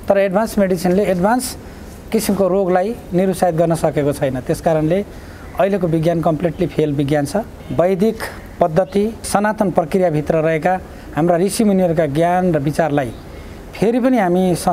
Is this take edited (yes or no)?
yes